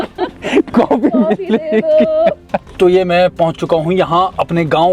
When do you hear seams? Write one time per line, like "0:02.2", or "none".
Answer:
0:02.6